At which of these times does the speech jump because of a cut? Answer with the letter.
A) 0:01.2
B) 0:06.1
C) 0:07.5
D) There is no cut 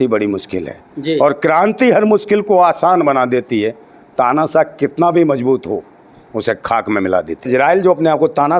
C